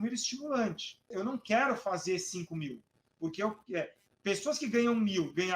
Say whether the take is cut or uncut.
cut